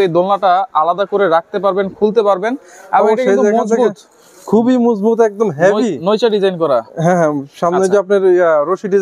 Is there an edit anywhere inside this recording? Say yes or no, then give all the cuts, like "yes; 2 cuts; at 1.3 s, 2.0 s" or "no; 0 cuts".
no; 0 cuts